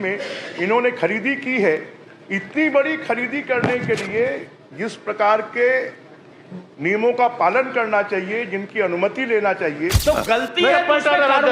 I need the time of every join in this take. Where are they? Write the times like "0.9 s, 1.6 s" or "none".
9.9 s